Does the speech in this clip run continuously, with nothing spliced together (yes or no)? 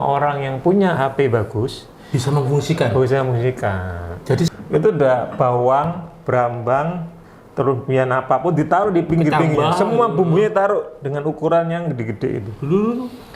no